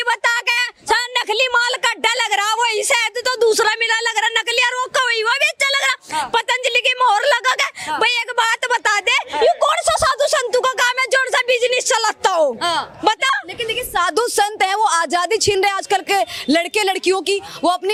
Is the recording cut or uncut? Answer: uncut